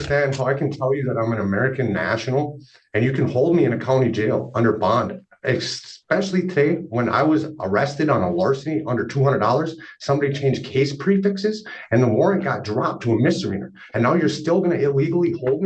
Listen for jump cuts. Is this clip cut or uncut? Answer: uncut